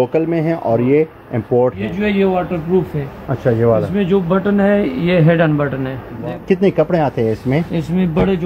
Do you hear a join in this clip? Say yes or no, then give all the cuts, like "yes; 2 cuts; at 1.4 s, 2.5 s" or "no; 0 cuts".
yes; 2 cuts; at 1.8 s, 6.2 s